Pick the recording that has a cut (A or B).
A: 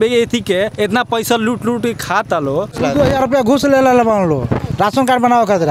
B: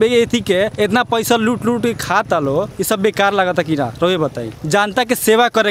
A